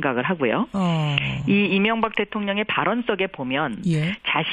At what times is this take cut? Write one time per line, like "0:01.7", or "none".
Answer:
0:03.0